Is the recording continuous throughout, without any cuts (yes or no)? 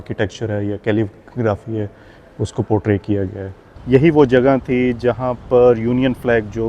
no